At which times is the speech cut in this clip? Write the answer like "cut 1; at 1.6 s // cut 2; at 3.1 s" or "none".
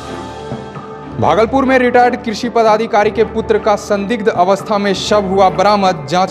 cut 1; at 1.0 s